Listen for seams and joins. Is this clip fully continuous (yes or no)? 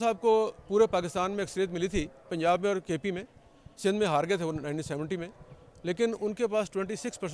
yes